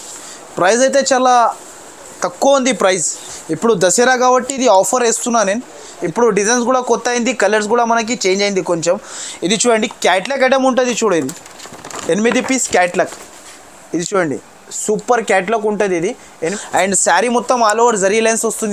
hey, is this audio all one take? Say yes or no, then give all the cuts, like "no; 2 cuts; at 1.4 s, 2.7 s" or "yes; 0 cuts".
no; 2 cuts; at 5.9 s, 16.5 s